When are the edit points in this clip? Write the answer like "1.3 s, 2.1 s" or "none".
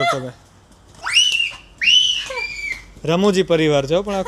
0.9 s